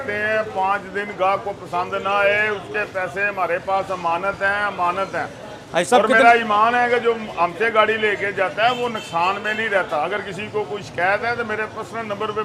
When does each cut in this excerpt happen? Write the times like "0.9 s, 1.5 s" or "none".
none